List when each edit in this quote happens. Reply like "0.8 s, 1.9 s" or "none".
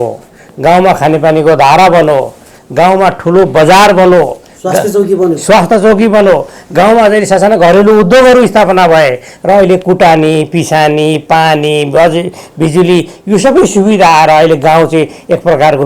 none